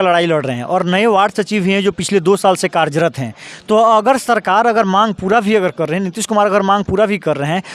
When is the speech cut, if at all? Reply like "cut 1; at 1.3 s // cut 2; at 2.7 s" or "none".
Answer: none